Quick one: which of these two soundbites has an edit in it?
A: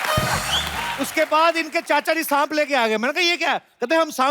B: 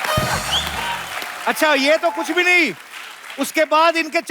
A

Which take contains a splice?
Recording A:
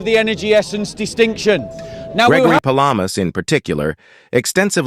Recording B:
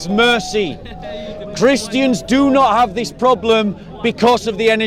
A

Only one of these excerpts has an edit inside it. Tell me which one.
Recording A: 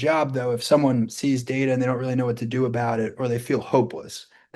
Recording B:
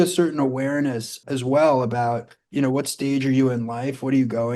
B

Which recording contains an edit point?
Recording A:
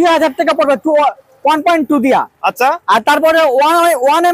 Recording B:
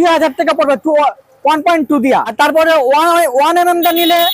B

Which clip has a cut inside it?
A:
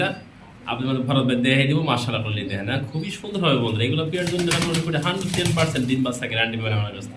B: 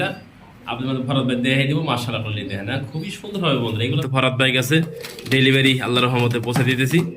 B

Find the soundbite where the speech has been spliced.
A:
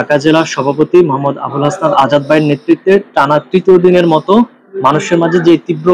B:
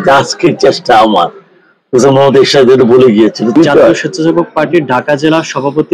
B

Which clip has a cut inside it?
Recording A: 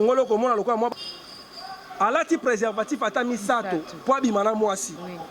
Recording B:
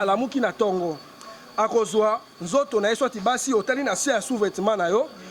A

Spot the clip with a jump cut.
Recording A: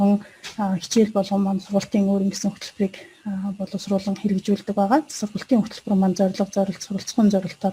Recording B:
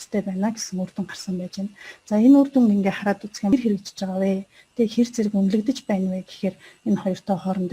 B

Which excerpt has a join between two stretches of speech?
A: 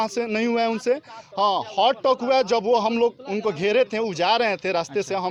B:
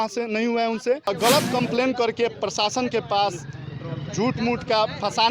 B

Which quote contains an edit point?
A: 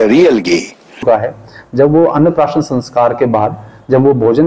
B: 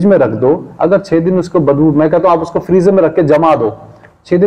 A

